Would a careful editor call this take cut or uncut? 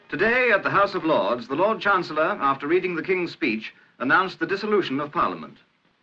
uncut